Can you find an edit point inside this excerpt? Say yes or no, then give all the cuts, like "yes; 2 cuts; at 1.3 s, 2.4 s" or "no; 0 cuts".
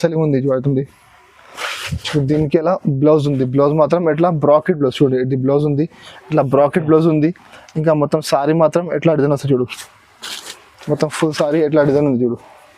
no; 0 cuts